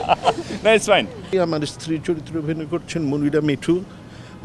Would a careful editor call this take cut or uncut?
cut